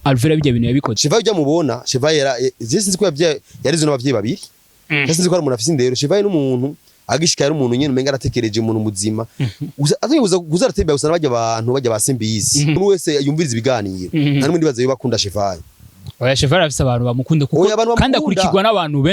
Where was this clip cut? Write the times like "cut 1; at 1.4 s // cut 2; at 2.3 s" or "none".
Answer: cut 1; at 0.9 s // cut 2; at 12.8 s